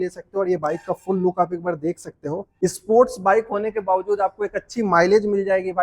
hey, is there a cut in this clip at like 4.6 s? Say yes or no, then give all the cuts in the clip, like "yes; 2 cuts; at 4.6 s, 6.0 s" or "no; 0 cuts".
no; 1 cut; at 2.5 s